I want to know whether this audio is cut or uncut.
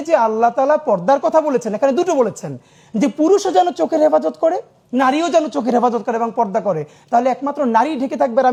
uncut